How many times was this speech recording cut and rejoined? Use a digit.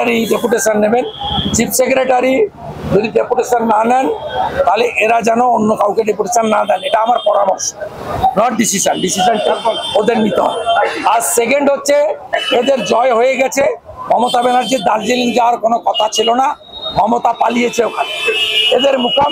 0